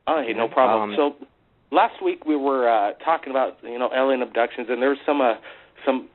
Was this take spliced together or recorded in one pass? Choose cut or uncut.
cut